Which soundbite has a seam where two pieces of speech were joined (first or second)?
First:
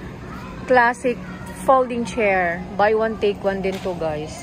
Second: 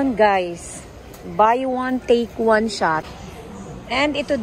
second